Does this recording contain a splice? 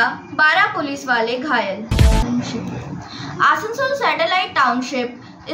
yes; 1 cut; at 1.9 s

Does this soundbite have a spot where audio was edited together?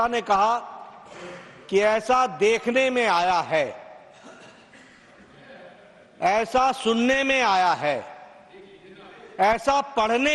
no; 0 cuts

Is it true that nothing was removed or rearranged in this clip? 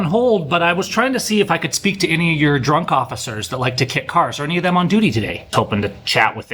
no; 1 cut; at 5.5 s

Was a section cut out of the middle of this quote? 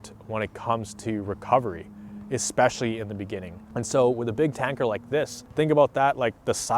yes; 2 cuts; at 3.6 s, 5.4 s

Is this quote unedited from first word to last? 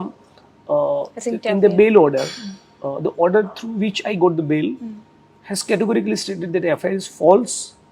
yes; 0 cuts

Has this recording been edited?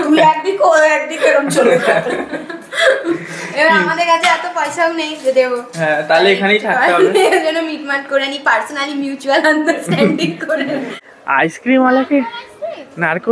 yes; 1 cut; at 11.1 s

